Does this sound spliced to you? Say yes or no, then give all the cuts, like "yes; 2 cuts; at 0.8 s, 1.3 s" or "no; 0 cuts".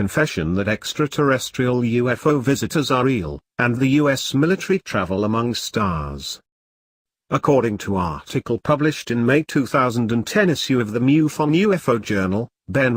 no; 0 cuts